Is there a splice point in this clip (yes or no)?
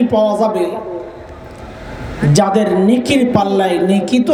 no